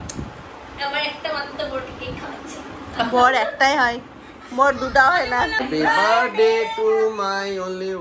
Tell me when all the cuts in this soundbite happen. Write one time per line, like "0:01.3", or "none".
0:05.6